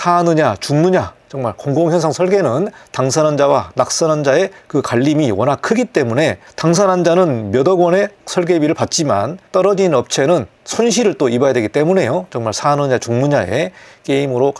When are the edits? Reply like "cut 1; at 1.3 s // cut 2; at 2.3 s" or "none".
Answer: none